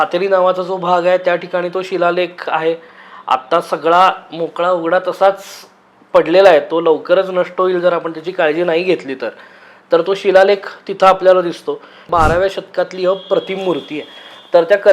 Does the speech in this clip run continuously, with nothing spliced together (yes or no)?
no